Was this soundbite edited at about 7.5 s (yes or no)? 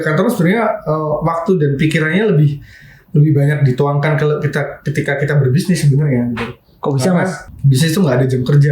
yes